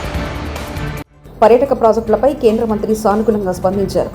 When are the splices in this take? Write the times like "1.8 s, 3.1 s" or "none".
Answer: 1.1 s